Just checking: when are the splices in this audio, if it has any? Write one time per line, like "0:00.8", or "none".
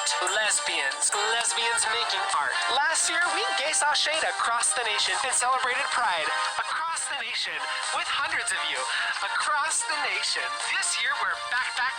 none